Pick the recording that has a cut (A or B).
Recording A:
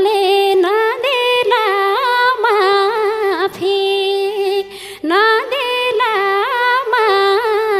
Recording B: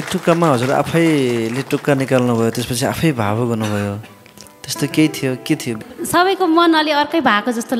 B